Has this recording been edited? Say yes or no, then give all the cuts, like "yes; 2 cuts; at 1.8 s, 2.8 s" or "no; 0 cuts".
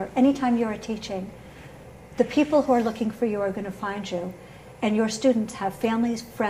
yes; 1 cut; at 5.6 s